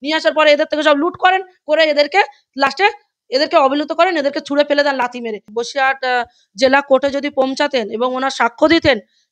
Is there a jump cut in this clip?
yes; 1 cut; at 5.5 s

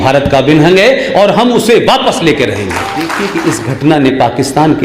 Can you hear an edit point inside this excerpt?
yes; 1 cut; at 3.2 s

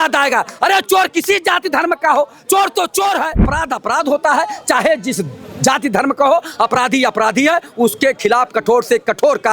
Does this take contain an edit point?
yes; 1 cut; at 3.5 s

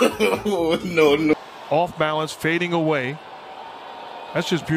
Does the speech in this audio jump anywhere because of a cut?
yes; 1 cut; at 1.3 s

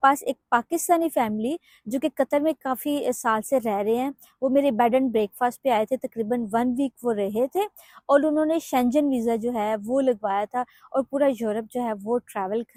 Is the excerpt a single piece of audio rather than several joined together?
yes; 0 cuts

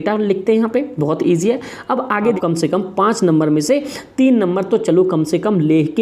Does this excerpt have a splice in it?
yes; 1 cut; at 2.2 s

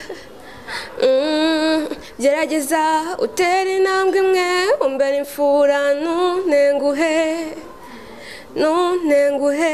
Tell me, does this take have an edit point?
no; 0 cuts

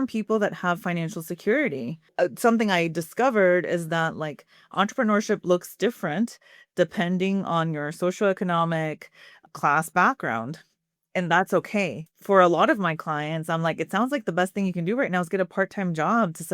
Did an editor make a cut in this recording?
yes; 1 cut; at 2.0 s

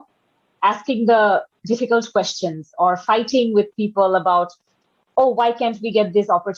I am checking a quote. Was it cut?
no; 0 cuts

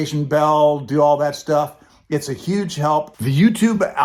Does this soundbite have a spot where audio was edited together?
no; 0 cuts

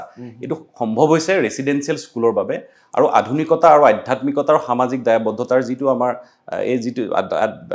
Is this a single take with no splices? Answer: yes; 0 cuts

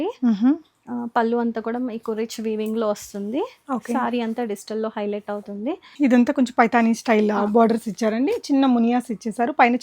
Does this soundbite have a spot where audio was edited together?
yes; 1 cut; at 5.8 s

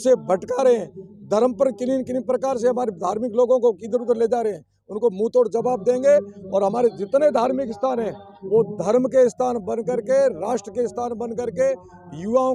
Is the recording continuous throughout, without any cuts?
yes; 0 cuts

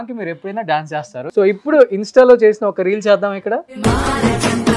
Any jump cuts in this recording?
yes; 2 cuts; at 1.2 s, 3.7 s

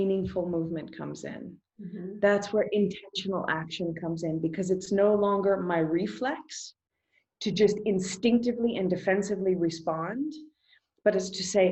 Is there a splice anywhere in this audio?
no; 0 cuts

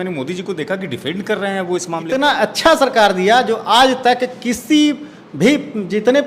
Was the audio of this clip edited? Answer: yes; 1 cut; at 2.1 s

